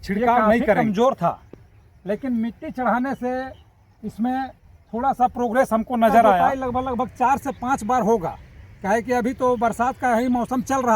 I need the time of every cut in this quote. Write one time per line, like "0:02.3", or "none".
0:00.8
0:06.4